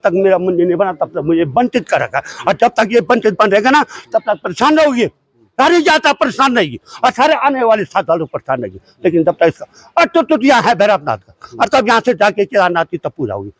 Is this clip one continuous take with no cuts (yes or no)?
yes